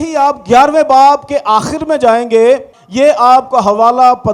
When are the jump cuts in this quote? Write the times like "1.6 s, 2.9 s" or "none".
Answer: 2.8 s